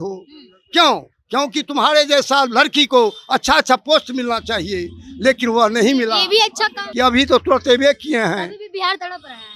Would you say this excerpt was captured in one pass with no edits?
no; 1 cut; at 6.8 s

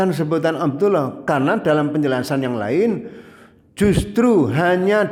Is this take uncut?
yes; 0 cuts

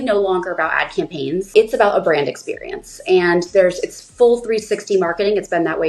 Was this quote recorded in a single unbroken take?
no; 1 cut; at 1.5 s

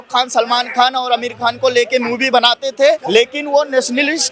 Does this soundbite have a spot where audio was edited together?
yes; 1 cut; at 3.0 s

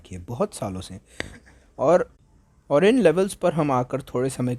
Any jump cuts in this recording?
no; 0 cuts

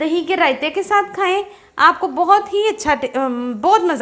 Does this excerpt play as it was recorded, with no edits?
yes; 0 cuts

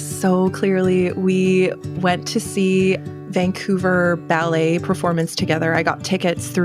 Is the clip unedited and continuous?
no; 1 cut; at 3.1 s

